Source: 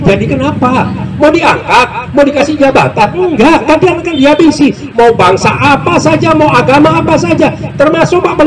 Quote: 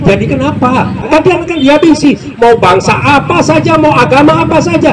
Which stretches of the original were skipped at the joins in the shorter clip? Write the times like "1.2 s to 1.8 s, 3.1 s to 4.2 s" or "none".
1.1 s to 3.6 s